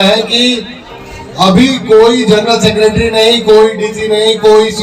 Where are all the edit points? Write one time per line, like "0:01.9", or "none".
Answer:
none